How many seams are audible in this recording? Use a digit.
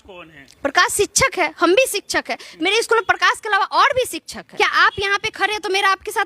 1